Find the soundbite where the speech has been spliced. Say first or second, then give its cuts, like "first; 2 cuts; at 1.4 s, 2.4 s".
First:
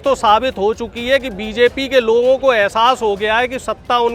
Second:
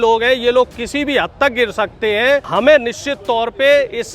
second; 1 cut; at 2.5 s